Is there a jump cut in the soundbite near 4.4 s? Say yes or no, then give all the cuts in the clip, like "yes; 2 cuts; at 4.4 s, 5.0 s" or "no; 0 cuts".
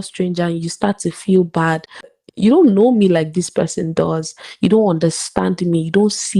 no; 1 cut; at 2.2 s